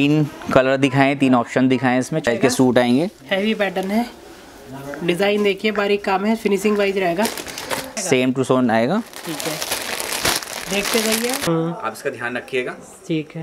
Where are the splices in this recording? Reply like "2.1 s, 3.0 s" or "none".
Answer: 2.3 s, 7.9 s, 11.4 s